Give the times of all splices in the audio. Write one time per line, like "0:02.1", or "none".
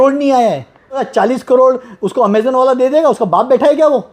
0:01.1